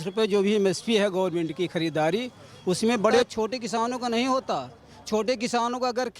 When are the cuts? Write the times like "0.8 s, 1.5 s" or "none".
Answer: none